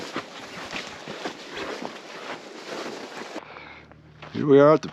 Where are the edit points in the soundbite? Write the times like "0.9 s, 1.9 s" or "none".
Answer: 3.4 s